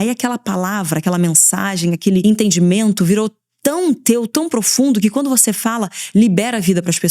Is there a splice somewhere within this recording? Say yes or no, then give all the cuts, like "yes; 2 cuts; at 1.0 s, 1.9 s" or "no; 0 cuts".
yes; 1 cut; at 2.2 s